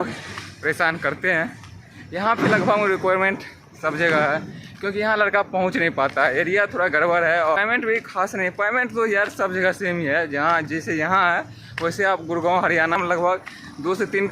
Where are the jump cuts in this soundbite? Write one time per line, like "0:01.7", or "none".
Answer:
0:07.6
0:13.0